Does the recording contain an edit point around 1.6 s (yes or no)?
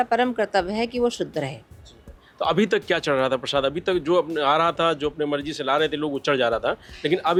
no